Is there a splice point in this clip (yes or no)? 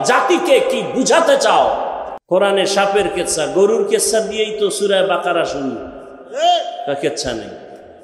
yes